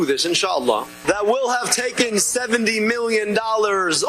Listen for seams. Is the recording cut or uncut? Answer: cut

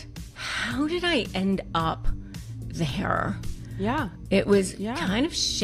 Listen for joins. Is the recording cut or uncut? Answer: uncut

